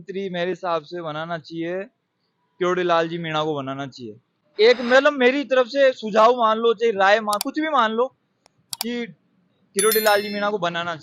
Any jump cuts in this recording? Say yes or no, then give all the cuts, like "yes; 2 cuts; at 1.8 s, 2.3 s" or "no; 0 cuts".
yes; 1 cut; at 4.4 s